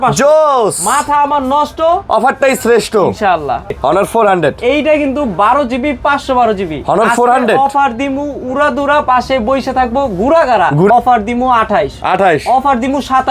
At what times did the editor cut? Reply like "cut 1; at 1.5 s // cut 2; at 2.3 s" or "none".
cut 1; at 3.7 s // cut 2; at 10.9 s